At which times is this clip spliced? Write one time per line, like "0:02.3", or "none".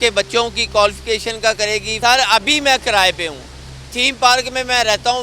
0:01.9